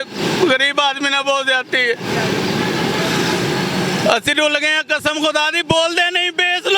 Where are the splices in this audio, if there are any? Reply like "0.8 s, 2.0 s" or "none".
none